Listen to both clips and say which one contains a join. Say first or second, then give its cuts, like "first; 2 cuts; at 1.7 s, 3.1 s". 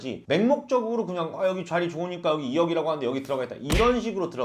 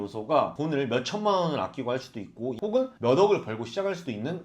second; 1 cut; at 2.5 s